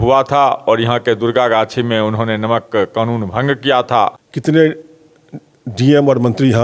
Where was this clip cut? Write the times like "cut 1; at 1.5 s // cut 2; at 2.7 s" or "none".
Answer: cut 1; at 4.3 s